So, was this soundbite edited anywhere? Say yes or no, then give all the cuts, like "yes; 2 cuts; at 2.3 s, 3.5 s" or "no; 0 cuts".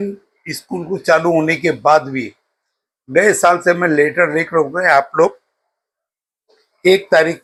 no; 0 cuts